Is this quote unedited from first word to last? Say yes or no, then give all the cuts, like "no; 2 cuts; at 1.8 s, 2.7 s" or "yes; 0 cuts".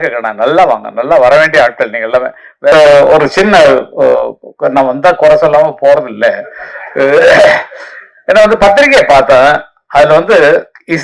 no; 1 cut; at 2.7 s